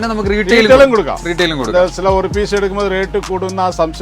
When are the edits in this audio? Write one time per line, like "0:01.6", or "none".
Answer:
none